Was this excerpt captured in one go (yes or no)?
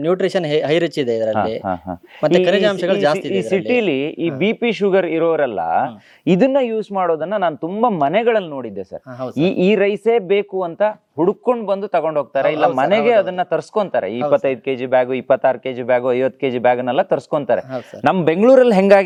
yes